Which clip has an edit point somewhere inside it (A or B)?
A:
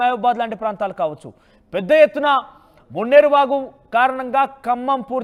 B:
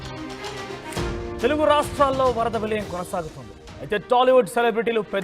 B